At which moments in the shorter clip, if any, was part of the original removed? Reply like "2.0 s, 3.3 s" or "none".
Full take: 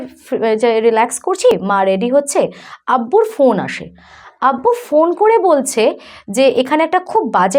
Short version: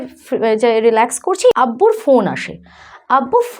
1.6 s